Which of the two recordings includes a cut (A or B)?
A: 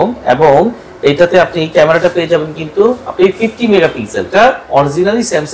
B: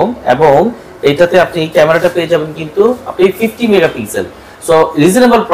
A